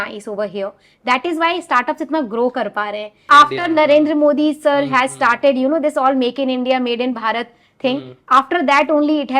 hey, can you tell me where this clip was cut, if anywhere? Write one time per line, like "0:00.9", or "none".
0:03.2